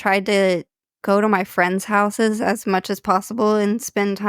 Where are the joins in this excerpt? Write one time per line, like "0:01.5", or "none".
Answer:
0:00.9